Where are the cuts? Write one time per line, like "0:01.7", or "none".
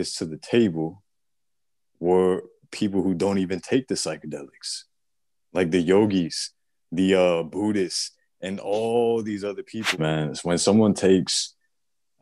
0:10.0